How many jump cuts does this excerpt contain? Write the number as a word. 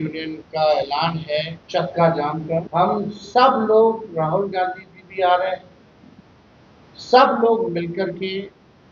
two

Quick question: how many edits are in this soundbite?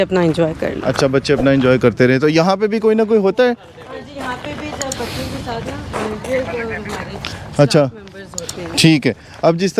zero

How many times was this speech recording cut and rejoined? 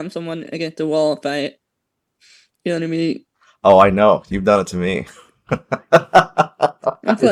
zero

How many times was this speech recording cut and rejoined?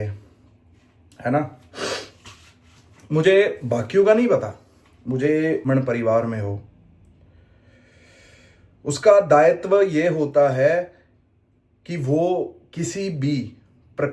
one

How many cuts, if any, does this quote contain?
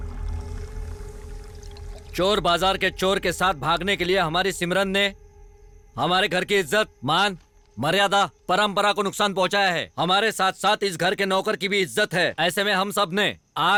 zero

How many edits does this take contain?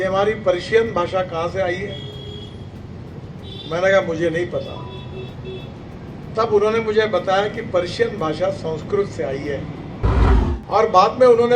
one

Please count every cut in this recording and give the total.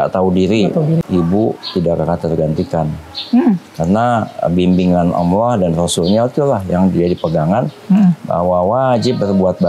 one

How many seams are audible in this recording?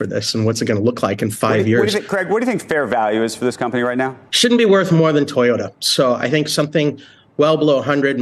one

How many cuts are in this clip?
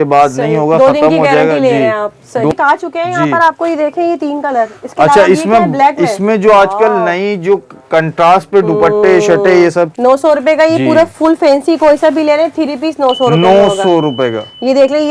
two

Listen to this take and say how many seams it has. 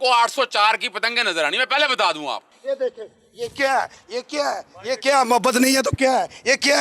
one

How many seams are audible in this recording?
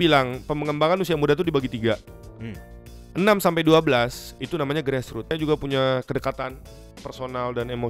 one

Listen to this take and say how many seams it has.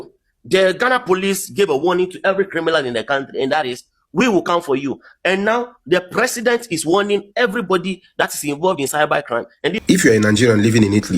one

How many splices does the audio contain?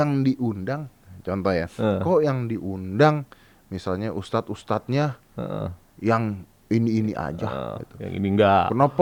zero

